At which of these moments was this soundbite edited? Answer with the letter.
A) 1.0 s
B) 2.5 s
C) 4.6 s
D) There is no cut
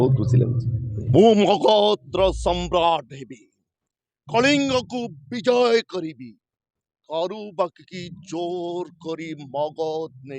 A